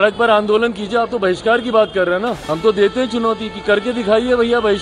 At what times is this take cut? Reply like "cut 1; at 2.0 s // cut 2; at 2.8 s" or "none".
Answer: cut 1; at 2.4 s